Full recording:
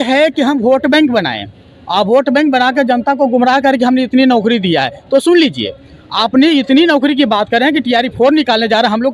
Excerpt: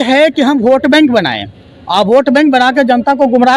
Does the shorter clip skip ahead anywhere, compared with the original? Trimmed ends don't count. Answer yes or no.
no